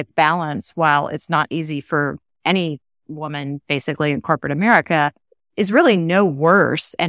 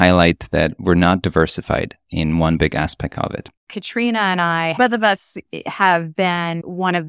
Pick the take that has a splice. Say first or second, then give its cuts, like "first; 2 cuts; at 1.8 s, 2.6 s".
second; 2 cuts; at 3.6 s, 4.8 s